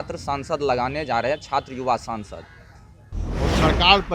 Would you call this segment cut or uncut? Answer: cut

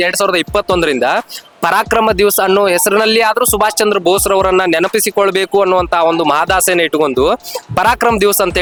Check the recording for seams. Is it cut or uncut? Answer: uncut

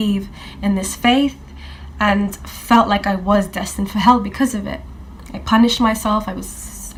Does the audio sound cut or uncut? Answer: uncut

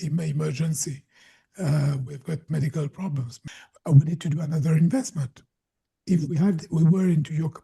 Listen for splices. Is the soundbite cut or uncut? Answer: cut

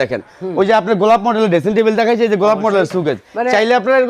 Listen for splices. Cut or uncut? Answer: uncut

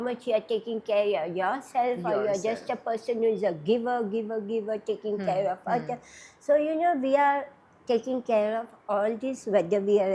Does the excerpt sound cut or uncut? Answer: uncut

